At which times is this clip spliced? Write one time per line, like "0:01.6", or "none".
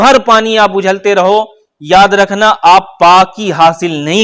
none